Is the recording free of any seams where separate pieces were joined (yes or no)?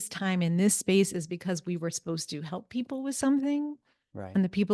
yes